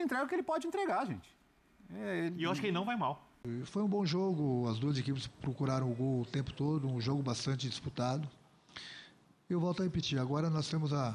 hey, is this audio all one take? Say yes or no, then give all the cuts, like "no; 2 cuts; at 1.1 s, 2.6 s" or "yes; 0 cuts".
no; 1 cut; at 3.4 s